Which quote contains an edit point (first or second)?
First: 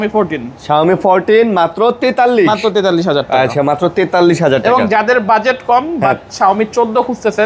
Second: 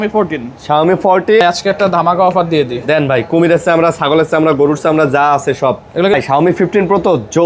second